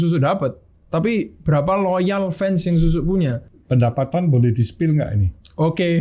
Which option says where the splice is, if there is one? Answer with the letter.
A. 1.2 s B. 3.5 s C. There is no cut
B